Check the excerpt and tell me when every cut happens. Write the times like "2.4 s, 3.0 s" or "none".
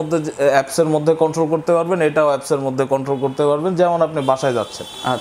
none